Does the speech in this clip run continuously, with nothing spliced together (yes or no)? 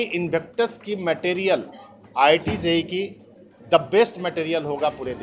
yes